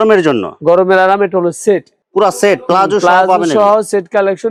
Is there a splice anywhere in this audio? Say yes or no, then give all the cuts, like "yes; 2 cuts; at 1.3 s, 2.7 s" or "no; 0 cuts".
no; 0 cuts